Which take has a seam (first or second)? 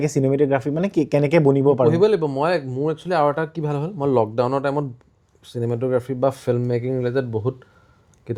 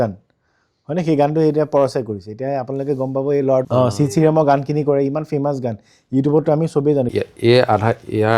second